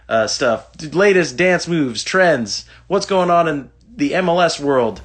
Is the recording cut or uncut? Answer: uncut